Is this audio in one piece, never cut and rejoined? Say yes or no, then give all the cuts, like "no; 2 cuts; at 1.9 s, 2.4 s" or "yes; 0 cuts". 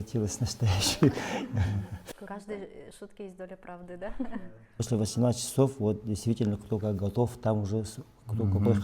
no; 1 cut; at 4.8 s